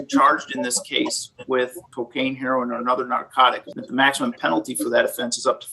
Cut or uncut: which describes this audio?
cut